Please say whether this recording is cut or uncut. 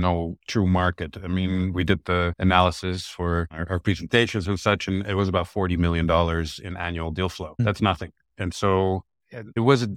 uncut